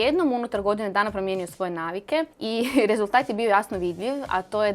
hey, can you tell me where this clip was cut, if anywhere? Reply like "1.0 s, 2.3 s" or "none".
2.4 s